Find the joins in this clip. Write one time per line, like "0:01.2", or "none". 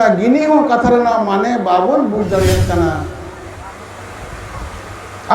0:03.5